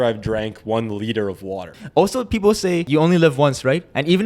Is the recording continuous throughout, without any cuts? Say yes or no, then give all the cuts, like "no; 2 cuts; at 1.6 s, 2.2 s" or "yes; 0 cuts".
no; 2 cuts; at 1.8 s, 2.9 s